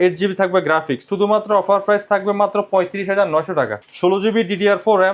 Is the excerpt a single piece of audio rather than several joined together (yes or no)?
no